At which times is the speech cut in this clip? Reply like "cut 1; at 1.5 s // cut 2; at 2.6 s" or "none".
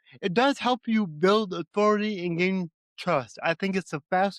none